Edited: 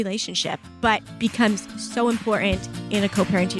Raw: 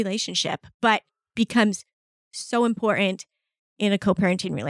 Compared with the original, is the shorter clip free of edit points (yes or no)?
no